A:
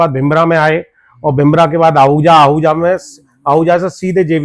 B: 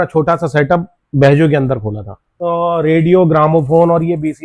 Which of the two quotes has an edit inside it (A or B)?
B